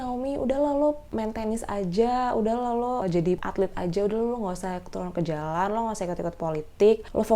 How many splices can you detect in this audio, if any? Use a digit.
2